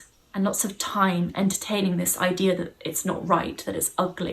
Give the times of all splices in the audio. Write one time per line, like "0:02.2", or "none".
none